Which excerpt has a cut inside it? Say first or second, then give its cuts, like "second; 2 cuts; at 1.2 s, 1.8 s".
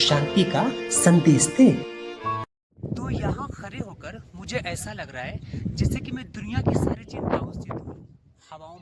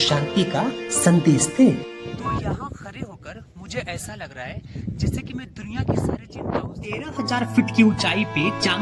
second; 2 cuts; at 2.3 s, 7.1 s